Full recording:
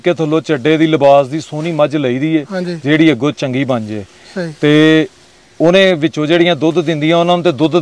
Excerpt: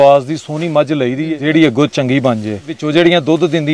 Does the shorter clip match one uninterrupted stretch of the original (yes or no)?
no